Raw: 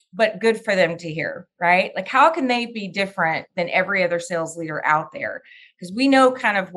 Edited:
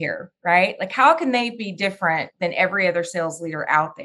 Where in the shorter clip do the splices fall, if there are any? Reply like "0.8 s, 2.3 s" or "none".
none